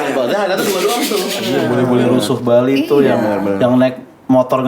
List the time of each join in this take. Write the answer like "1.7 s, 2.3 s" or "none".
1.4 s